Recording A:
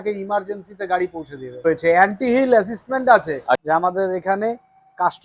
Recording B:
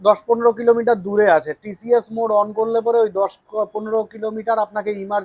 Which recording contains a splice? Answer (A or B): A